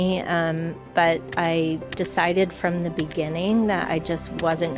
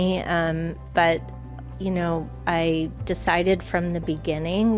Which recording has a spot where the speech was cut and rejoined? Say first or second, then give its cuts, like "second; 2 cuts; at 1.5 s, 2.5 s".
first; 1 cut; at 1.3 s